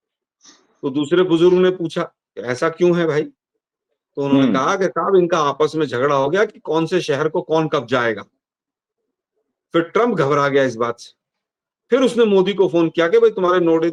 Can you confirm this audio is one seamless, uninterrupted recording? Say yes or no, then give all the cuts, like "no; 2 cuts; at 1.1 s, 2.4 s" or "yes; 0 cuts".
yes; 0 cuts